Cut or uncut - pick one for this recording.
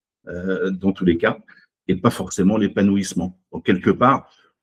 uncut